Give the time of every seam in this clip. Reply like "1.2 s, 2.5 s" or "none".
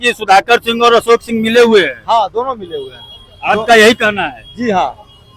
none